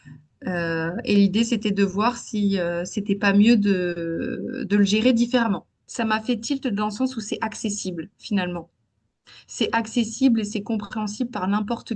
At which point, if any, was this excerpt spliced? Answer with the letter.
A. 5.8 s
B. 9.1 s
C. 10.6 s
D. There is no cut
A